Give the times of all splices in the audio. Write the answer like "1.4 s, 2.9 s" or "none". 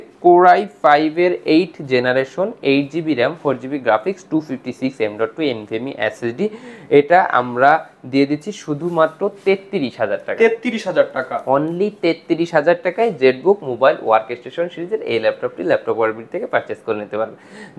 none